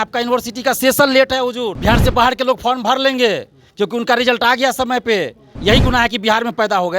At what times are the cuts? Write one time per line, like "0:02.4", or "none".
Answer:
0:01.8
0:05.5